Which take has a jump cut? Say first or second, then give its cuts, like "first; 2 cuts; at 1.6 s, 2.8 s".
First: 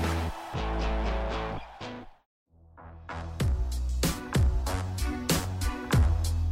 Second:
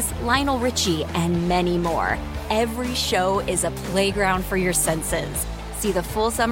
first; 1 cut; at 2.3 s